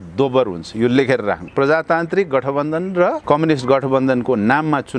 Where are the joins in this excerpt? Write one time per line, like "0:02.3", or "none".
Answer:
0:01.4
0:03.2